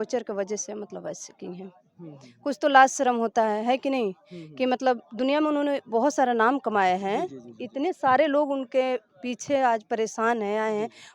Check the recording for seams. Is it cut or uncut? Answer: uncut